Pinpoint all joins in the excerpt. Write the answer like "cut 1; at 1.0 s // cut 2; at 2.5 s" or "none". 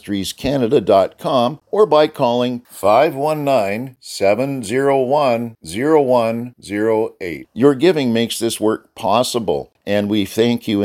cut 1; at 1.6 s // cut 2; at 9.7 s